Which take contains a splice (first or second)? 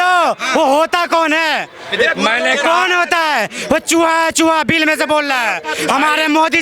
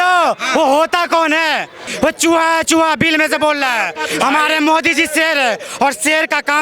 second